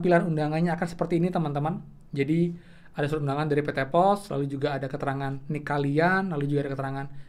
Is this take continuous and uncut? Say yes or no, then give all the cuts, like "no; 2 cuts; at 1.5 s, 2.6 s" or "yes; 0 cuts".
yes; 0 cuts